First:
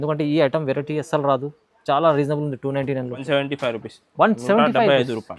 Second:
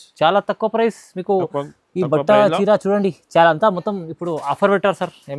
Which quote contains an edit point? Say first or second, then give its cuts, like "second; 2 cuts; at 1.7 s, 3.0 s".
first; 1 cut; at 3.2 s